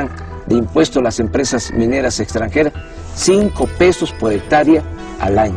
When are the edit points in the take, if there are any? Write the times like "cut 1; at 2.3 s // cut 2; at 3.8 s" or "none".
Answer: cut 1; at 1.7 s